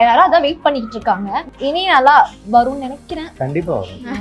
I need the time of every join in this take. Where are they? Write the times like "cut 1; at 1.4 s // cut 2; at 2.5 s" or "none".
cut 1; at 1.6 s // cut 2; at 3.3 s